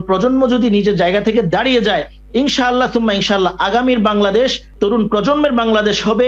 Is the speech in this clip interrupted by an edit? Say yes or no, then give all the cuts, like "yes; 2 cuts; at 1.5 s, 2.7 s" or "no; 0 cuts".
yes; 1 cut; at 4.6 s